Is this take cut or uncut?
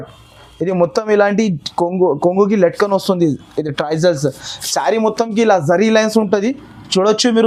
uncut